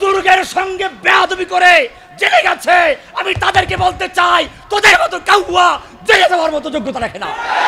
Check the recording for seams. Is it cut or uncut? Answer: uncut